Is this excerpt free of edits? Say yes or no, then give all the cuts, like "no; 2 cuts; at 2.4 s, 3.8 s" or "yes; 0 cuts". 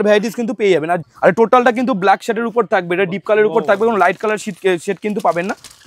no; 1 cut; at 1.0 s